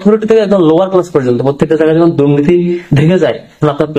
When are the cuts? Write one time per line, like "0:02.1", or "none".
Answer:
none

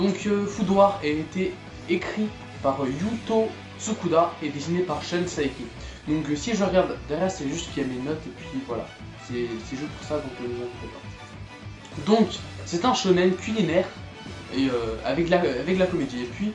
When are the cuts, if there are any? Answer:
none

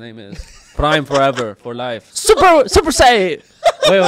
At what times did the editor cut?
0:02.1

